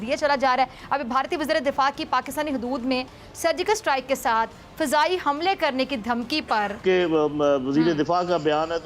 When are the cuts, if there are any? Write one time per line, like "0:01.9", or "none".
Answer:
0:06.8